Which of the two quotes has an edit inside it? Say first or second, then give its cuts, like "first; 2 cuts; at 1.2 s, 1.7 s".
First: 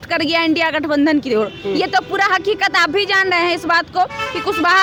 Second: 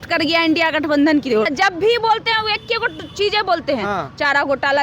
second; 1 cut; at 1.5 s